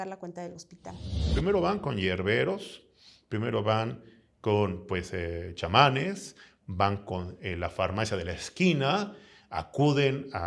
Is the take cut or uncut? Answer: cut